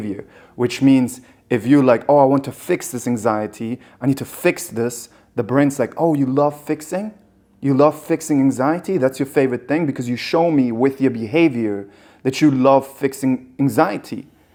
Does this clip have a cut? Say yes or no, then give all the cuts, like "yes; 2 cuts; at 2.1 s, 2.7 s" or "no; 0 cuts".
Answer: no; 0 cuts